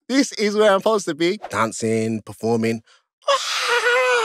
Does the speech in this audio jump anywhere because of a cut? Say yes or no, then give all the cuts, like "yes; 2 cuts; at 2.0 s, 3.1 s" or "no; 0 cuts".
yes; 1 cut; at 1.5 s